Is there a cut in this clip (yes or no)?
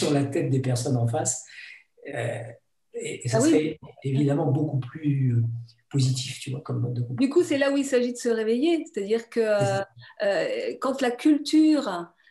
no